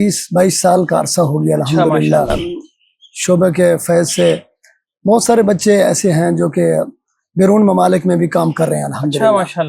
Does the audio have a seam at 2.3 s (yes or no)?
yes